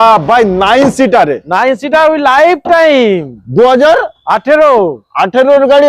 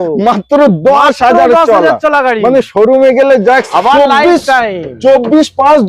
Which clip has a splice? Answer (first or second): second